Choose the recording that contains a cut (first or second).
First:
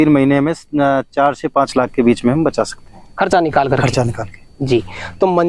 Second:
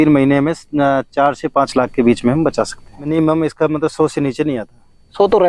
second